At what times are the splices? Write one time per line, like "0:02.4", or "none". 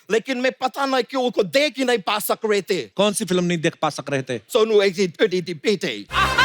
0:02.9
0:04.4